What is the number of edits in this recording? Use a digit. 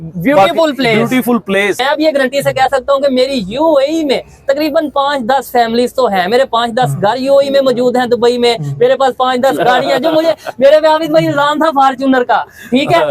1